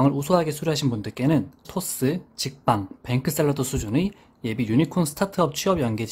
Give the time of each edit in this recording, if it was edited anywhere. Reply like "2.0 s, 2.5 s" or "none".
none